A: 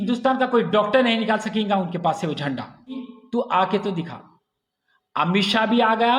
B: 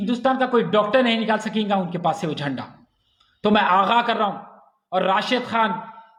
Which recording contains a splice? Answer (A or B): A